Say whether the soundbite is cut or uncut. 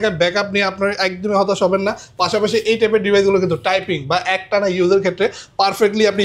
uncut